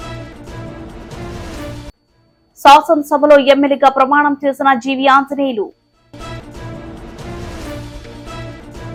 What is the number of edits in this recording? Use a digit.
0